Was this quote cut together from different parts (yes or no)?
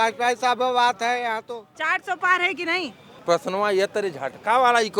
yes